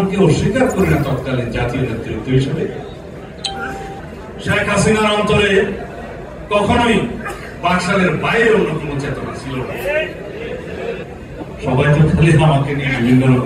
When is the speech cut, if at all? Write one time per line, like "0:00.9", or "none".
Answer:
0:04.0
0:11.1

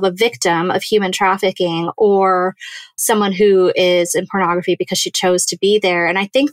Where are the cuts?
0:03.0

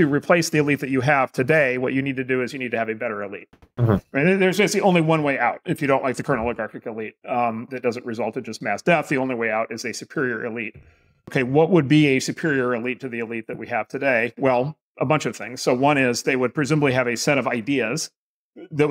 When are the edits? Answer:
0:11.3

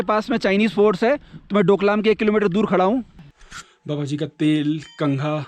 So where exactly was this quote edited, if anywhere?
0:03.1

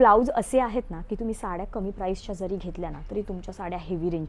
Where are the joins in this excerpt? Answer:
none

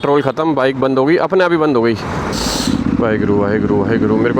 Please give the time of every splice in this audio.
0:02.4

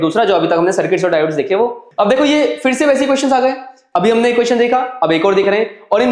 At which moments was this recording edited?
0:01.8

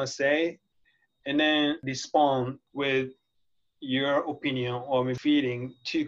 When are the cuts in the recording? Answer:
0:01.8
0:02.6
0:05.2

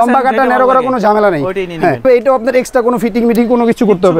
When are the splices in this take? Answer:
0:02.0

